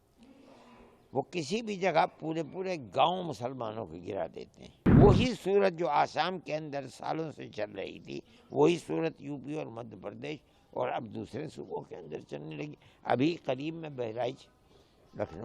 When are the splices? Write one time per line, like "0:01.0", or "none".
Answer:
0:04.9